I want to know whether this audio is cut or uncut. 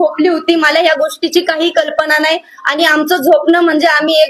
uncut